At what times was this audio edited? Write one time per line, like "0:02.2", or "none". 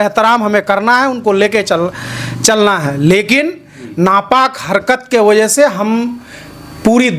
none